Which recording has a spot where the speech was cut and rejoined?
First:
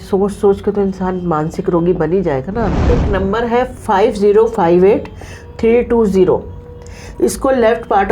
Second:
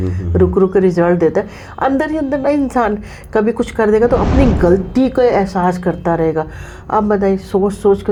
first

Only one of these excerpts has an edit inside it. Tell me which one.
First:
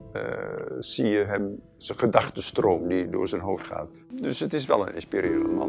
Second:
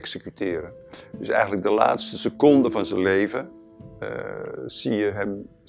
first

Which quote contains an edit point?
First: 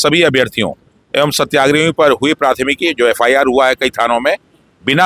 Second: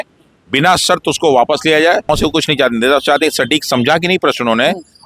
second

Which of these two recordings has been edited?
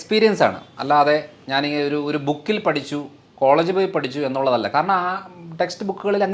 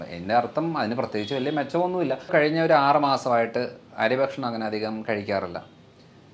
second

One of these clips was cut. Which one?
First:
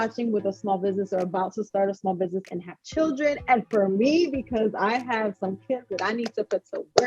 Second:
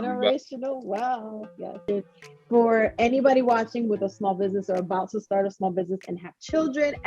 second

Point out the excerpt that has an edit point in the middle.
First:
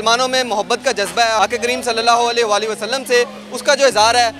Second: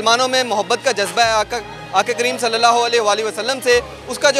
first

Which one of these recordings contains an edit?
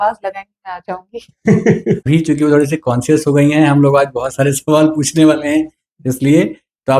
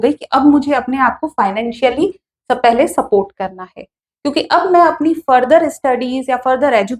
first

